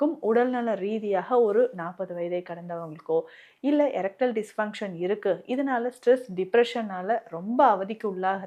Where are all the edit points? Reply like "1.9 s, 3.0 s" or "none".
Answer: none